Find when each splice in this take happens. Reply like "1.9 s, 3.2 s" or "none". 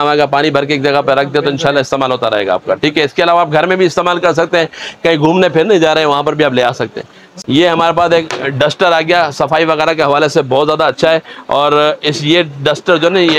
7.4 s